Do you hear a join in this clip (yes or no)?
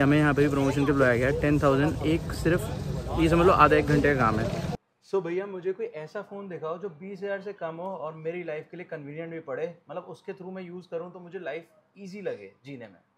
yes